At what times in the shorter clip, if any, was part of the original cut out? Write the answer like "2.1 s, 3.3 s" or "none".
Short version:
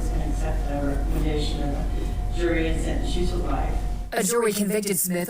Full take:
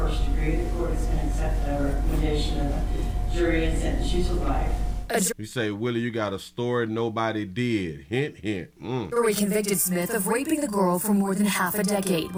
4.3 s